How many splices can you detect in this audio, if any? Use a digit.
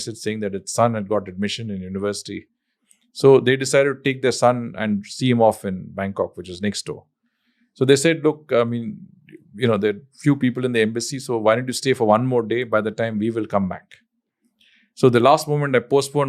0